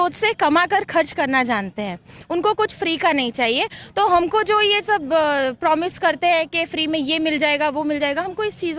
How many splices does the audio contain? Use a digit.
0